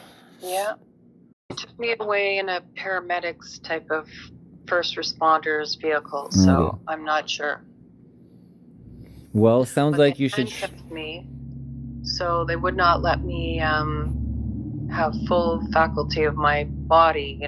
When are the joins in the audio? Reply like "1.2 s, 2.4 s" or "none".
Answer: 1.7 s